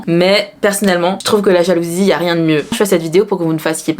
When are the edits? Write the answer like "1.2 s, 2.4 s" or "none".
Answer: 2.7 s